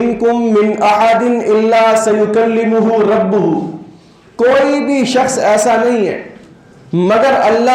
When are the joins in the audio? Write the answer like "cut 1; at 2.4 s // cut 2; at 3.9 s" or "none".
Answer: none